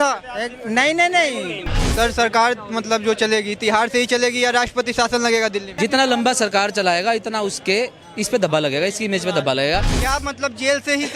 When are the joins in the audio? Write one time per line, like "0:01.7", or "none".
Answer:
0:01.8
0:05.7
0:10.0